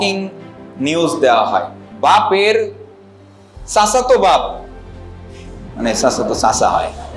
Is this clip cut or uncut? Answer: cut